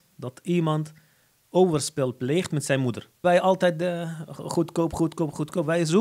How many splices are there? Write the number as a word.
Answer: one